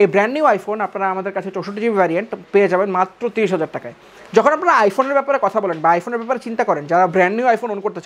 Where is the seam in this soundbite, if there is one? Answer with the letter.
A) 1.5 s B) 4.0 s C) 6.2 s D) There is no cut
D